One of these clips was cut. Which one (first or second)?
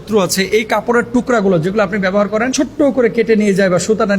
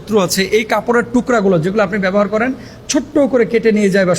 first